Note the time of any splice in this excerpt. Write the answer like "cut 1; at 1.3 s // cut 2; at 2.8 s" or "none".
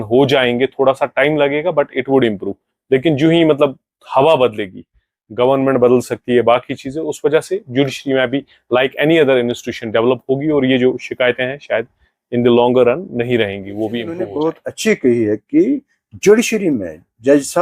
cut 1; at 14.3 s